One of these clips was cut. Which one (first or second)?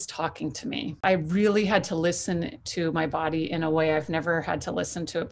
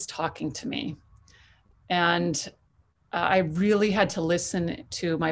first